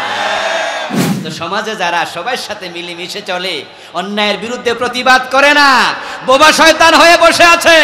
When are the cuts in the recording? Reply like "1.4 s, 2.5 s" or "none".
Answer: 1.1 s